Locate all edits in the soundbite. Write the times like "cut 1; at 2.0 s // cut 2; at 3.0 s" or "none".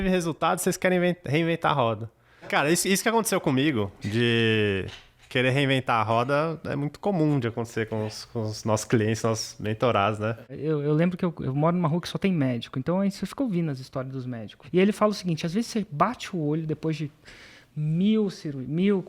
cut 1; at 2.3 s // cut 2; at 10.5 s // cut 3; at 14.6 s